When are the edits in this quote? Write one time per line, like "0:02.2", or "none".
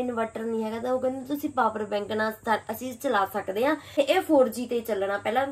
0:03.8

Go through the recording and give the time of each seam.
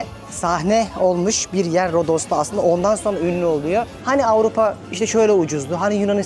0:04.0

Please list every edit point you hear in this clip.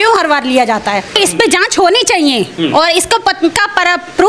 0:01.1

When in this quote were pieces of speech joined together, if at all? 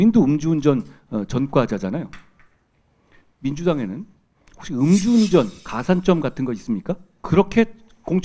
0:05.6
0:07.1

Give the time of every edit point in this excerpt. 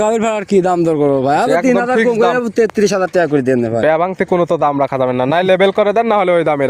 none

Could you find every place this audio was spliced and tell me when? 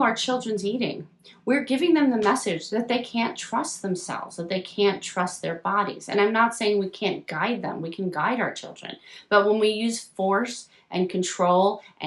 none

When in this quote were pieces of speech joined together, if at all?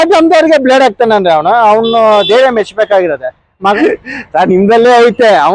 0:03.8

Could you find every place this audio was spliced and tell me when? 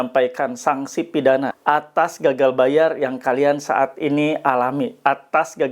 0:01.5

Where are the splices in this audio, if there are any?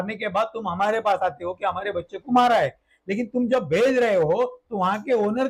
none

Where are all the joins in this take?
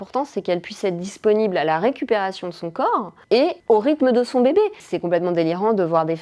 0:03.2

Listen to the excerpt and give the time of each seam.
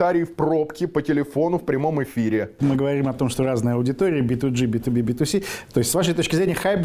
0:02.6

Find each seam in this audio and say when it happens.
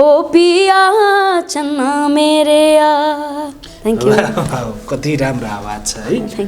none

